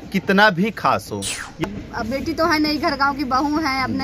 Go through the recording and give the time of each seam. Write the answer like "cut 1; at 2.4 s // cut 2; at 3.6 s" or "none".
cut 1; at 1.6 s